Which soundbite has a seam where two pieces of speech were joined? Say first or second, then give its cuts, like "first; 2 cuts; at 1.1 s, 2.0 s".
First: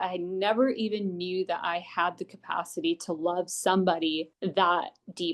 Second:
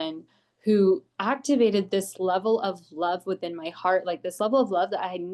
first; 1 cut; at 4.3 s